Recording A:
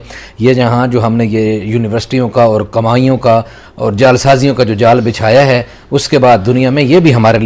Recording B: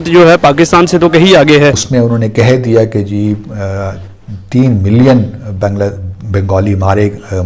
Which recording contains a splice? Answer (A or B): B